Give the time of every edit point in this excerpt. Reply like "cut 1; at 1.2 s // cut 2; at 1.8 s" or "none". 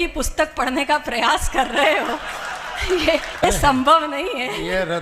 cut 1; at 3.4 s